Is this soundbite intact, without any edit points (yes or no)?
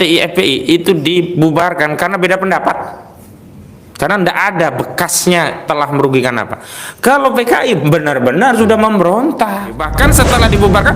no